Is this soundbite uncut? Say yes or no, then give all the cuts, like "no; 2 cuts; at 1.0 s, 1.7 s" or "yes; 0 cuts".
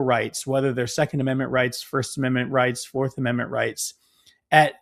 yes; 0 cuts